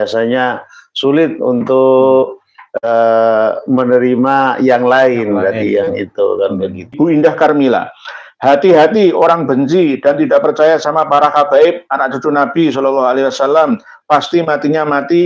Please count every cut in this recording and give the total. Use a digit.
1